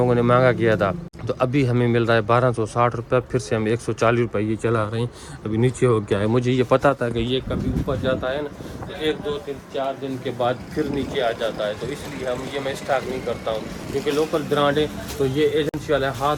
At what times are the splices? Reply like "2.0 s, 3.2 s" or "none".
none

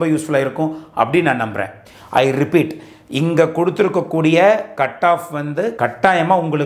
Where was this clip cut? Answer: 1.8 s

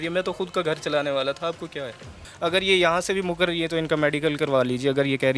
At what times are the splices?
2.2 s

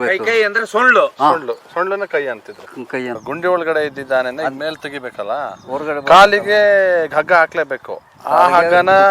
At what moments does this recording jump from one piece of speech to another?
3.2 s

